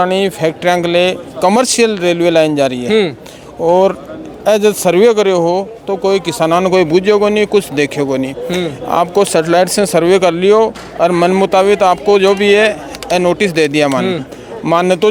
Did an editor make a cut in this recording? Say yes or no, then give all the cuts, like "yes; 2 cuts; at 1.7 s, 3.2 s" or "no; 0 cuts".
no; 0 cuts